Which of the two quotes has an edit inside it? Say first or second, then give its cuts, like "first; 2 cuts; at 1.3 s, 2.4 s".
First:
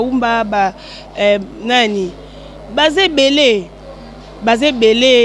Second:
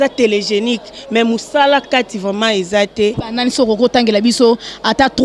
second; 1 cut; at 3.2 s